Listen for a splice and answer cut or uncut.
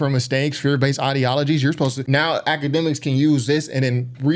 cut